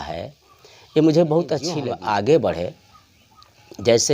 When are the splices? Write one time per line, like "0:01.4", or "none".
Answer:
0:01.9